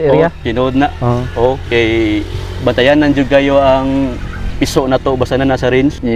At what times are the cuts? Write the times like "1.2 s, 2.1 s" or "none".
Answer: none